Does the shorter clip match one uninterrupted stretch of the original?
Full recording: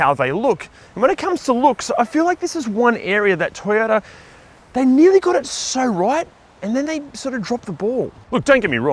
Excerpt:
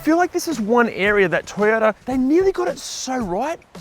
no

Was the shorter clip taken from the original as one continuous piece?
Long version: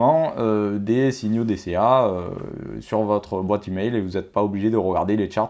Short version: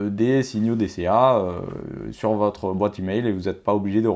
yes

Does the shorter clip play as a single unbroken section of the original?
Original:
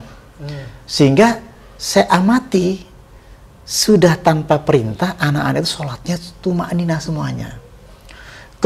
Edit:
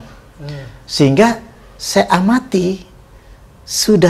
yes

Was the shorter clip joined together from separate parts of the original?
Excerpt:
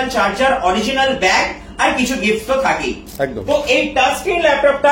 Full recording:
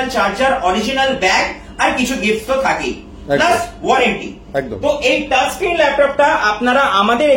yes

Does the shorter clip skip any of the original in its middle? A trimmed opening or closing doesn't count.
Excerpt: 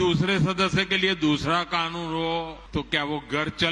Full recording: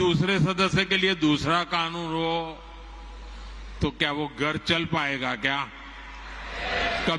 yes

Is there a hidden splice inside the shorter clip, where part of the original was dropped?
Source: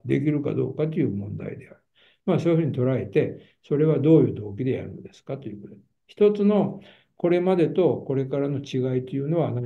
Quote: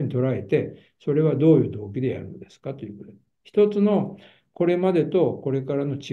no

